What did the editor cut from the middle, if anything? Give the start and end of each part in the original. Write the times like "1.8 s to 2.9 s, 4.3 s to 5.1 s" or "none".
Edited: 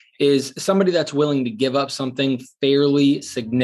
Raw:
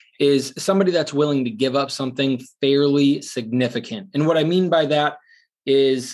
none